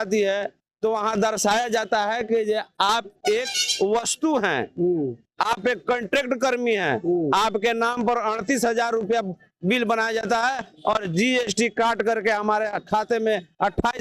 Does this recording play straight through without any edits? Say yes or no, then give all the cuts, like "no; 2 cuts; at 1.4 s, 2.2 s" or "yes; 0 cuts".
yes; 0 cuts